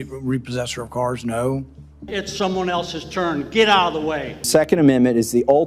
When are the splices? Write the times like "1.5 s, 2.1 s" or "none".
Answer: 2.1 s, 4.3 s